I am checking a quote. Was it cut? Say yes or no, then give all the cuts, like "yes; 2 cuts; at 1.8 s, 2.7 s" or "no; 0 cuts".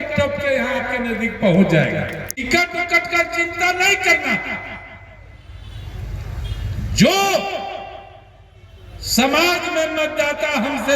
yes; 1 cut; at 2.5 s